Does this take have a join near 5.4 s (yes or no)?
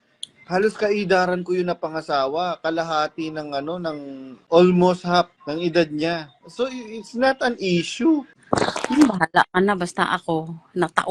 yes